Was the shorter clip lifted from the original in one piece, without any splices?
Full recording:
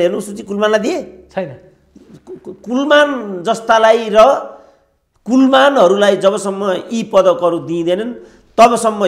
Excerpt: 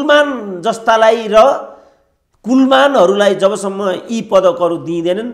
yes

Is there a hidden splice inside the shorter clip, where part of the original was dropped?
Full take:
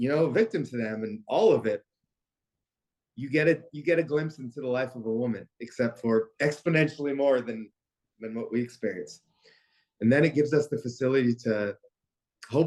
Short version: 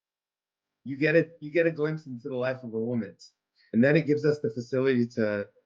yes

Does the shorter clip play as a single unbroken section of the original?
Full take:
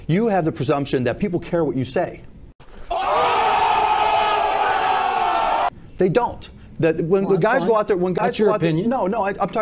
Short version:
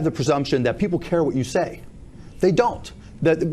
no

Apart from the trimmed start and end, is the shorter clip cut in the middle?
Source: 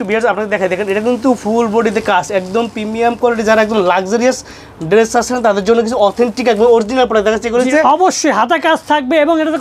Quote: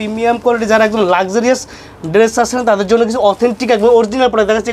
no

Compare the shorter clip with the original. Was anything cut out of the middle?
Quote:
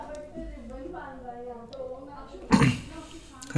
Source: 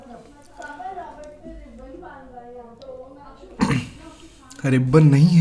no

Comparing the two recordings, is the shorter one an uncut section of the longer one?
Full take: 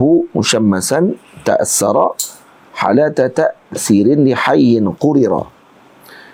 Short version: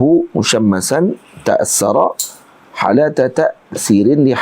yes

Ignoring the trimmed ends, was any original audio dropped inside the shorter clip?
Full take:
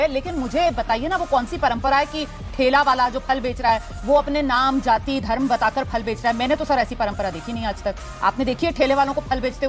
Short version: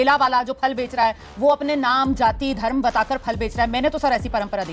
no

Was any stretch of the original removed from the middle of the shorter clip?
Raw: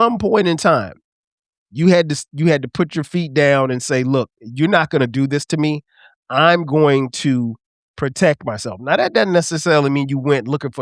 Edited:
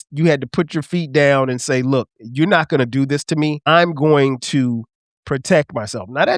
yes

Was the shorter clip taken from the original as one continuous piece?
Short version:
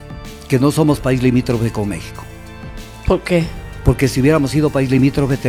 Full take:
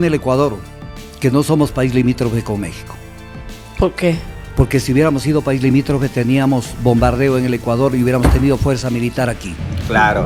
yes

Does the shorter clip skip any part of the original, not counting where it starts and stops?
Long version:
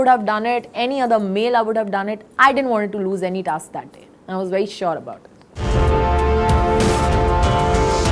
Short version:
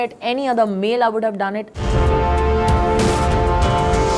yes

